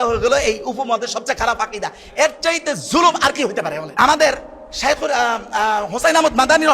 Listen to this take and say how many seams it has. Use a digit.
1